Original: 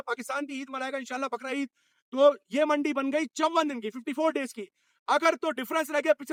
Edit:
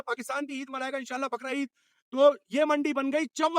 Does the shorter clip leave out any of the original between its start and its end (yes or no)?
no